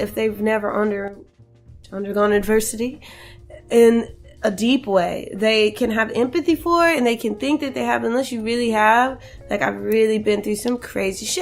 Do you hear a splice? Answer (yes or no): yes